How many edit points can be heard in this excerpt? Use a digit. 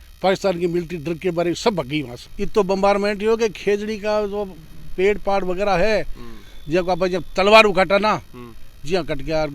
1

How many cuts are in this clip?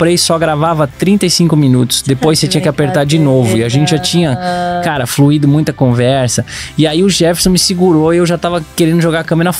1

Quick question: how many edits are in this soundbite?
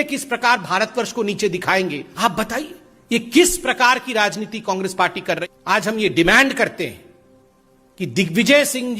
2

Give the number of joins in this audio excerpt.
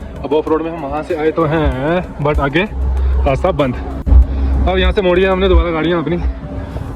0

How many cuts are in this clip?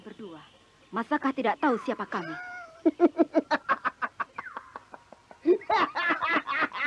0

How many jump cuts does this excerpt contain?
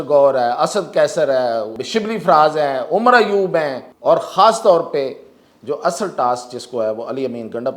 2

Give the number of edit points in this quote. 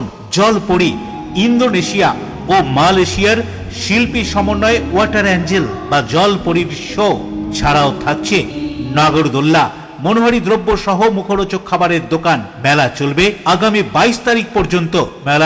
0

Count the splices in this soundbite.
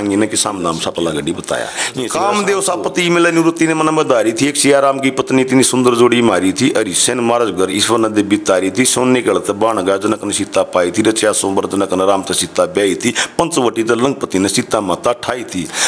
1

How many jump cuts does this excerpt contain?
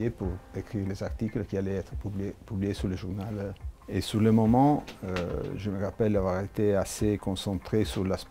1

